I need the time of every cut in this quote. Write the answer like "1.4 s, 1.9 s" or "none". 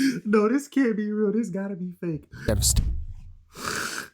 2.4 s